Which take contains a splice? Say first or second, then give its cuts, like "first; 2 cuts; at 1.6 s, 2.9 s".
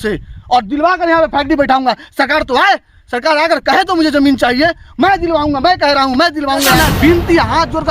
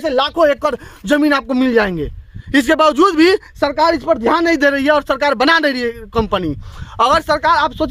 first; 1 cut; at 6.8 s